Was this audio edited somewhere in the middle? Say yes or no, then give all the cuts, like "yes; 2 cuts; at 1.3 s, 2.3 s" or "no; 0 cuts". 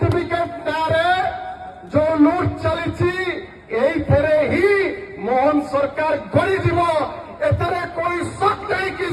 no; 0 cuts